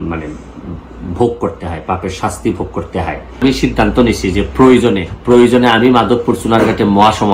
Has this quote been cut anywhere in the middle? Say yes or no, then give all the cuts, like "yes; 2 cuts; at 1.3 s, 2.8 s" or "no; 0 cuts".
yes; 1 cut; at 3.4 s